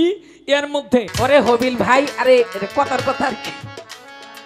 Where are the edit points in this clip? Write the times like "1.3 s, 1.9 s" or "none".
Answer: 1.1 s

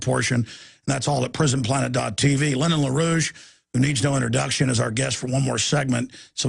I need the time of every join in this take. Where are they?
0.9 s

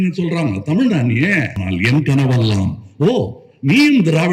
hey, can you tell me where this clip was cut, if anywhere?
1.6 s

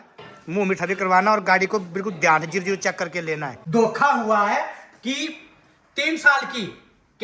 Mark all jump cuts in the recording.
3.5 s

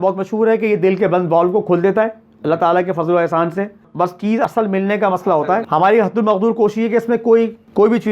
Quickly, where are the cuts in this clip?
4.3 s, 5.6 s

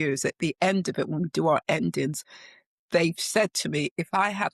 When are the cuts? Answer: none

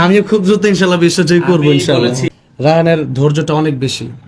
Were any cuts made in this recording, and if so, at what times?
2.2 s

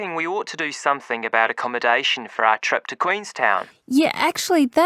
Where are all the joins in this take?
2.9 s

